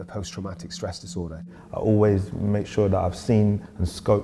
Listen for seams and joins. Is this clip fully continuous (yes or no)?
no